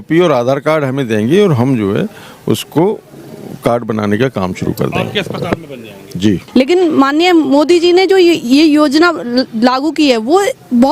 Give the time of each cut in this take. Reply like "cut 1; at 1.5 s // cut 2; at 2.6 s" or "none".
cut 1; at 6.4 s